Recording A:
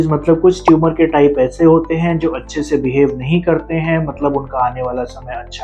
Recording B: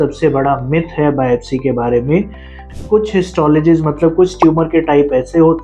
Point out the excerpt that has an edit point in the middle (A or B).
B